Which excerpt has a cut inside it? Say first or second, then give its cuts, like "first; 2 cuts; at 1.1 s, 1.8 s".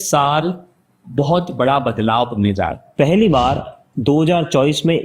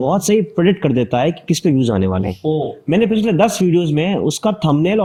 first; 1 cut; at 2.8 s